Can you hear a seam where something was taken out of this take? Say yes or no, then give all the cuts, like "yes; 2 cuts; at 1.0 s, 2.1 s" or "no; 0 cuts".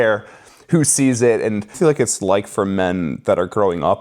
yes; 1 cut; at 1.7 s